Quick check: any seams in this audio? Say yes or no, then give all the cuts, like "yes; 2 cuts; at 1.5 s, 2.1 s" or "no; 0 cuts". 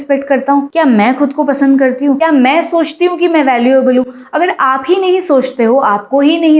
no; 0 cuts